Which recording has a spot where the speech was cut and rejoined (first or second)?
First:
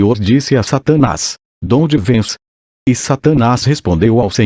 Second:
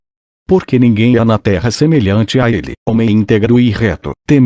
first